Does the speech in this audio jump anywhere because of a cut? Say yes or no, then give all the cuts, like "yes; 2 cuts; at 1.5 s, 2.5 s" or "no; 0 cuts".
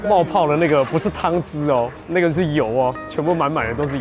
yes; 1 cut; at 2.0 s